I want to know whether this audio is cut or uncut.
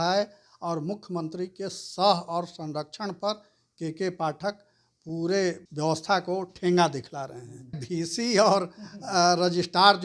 cut